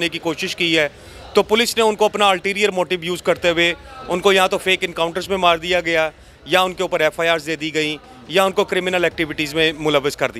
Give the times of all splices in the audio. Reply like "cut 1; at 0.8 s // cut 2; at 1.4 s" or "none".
none